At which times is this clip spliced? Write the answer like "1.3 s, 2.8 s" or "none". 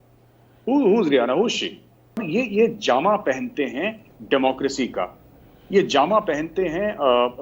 2.3 s